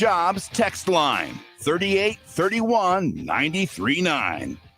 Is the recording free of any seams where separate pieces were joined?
yes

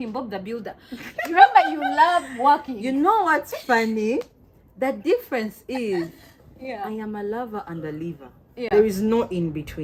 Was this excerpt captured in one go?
yes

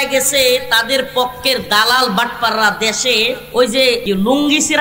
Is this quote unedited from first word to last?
no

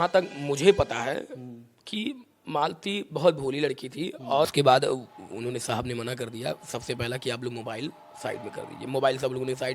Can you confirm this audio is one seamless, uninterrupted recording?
no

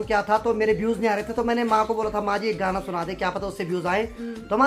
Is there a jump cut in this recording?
no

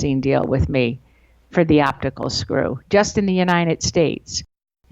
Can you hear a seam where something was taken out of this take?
no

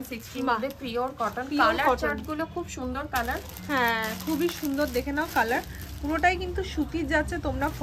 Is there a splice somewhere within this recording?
no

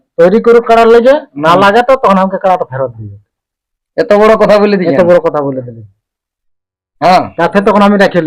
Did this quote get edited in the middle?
no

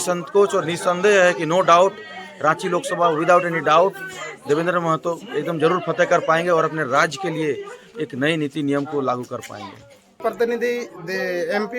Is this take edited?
yes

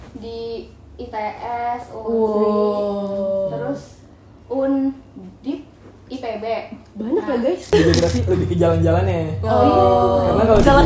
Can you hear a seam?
yes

